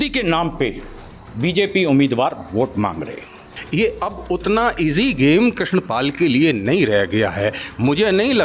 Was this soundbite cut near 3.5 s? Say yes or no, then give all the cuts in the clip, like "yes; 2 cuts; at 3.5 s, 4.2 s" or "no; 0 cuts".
yes; 1 cut; at 3.5 s